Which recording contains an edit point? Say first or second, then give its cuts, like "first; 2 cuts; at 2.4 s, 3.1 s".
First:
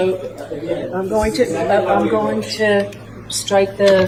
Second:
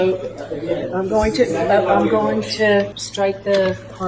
second; 1 cut; at 3.0 s